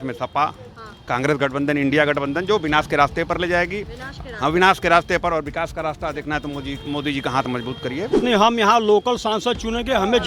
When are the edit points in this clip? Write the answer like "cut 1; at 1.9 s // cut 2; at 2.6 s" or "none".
cut 1; at 8.2 s